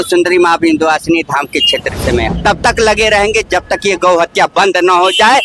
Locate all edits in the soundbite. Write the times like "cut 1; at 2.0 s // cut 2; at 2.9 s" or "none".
cut 1; at 2.4 s